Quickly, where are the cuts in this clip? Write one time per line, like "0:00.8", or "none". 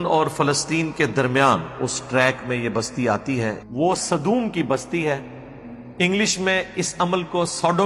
0:03.6